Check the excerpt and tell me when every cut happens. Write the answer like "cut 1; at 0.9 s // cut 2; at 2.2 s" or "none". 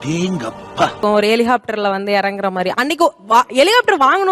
none